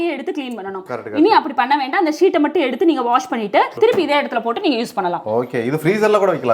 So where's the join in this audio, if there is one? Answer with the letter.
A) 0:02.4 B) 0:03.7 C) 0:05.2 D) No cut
D